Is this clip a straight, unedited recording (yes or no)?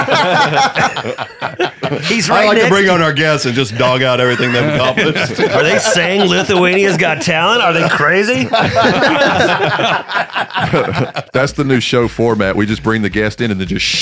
yes